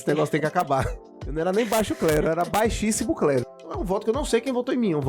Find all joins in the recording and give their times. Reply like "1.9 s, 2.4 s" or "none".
1.0 s, 3.5 s